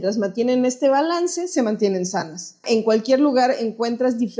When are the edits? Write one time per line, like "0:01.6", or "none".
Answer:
0:02.6